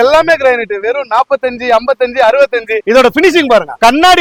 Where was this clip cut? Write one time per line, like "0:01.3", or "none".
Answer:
none

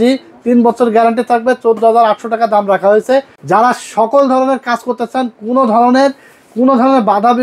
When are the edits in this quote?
0:03.4

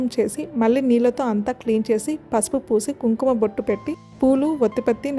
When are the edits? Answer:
none

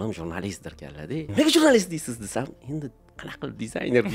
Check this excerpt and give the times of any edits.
0:01.3

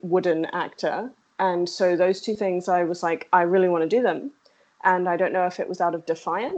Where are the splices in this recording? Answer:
0:01.2

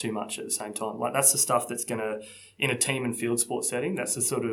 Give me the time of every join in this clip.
none

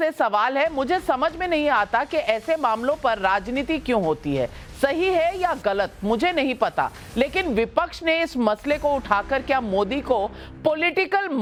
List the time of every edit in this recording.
none

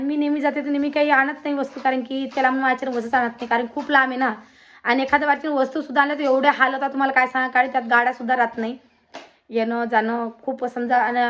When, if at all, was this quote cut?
none

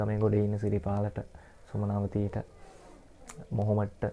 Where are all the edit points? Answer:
none

